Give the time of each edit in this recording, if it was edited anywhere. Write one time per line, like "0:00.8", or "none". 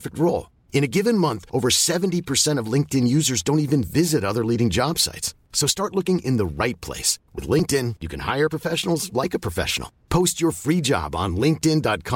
none